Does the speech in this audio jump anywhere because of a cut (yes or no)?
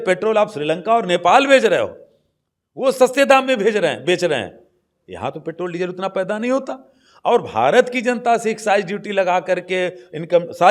no